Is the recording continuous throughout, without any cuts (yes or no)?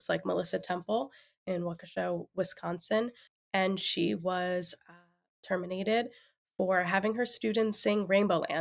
no